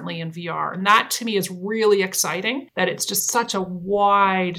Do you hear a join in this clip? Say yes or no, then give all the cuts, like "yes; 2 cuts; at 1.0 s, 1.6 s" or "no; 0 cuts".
yes; 1 cut; at 2.7 s